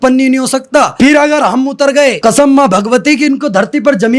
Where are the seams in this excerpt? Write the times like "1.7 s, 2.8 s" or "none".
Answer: 0.9 s, 2.2 s